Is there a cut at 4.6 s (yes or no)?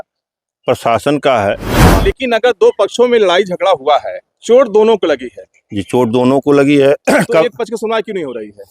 no